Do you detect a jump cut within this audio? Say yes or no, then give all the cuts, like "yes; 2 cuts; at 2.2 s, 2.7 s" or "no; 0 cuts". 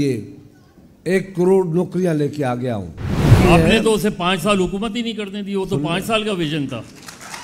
yes; 1 cut; at 3.3 s